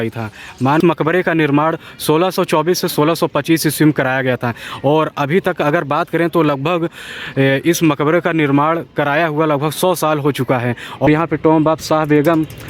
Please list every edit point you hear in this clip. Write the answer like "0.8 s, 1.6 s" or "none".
0.8 s, 11.1 s